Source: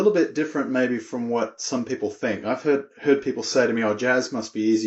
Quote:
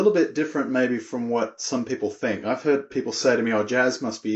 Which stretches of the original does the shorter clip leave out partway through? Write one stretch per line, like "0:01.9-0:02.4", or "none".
0:02.9-0:03.2